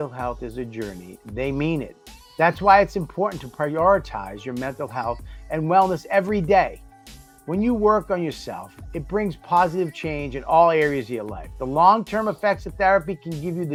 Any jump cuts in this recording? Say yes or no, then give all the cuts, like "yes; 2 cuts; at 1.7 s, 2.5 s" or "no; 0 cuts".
no; 0 cuts